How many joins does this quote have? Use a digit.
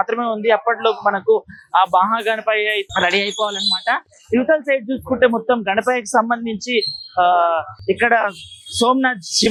0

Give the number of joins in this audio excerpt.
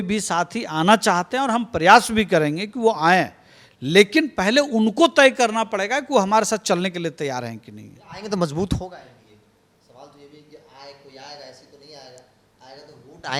0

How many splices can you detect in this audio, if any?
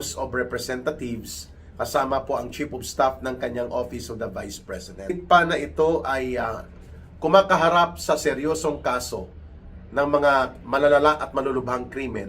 1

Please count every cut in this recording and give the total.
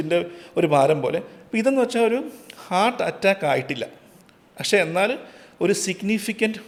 0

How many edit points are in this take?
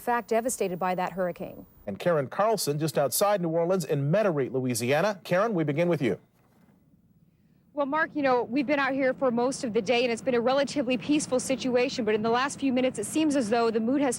1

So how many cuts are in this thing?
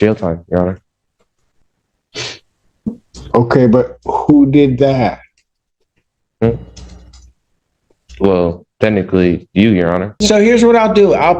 1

